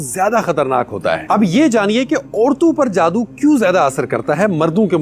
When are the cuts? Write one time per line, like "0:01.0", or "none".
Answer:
none